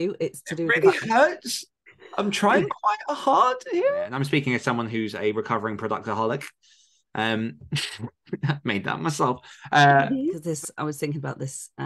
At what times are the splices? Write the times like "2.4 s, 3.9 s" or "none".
4.2 s, 10.5 s